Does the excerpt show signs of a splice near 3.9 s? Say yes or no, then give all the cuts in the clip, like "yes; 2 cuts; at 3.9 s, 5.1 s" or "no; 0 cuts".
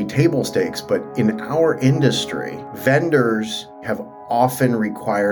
yes; 1 cut; at 3.9 s